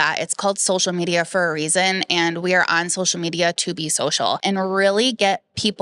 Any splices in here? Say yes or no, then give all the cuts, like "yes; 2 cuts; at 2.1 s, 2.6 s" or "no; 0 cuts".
yes; 1 cut; at 4.4 s